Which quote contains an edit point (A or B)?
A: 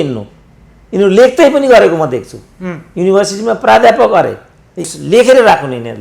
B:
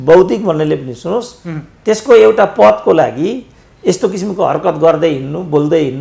A